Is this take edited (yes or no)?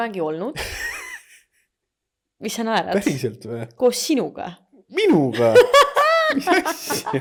no